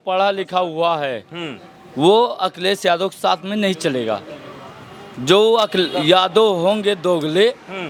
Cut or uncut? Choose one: uncut